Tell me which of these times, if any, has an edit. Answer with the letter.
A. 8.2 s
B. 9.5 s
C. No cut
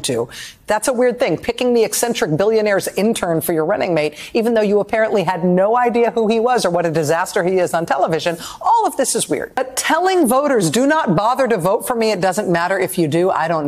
B